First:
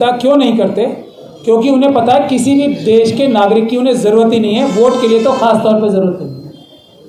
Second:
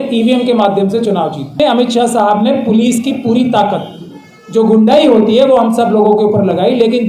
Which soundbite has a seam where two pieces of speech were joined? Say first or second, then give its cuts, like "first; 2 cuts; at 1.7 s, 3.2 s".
second; 1 cut; at 1.6 s